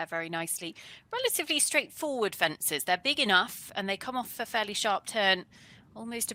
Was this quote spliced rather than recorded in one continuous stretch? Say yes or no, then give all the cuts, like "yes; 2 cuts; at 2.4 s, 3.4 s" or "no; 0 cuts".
no; 0 cuts